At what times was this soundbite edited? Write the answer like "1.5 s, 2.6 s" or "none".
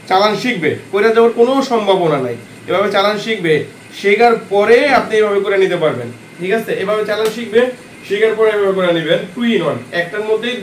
none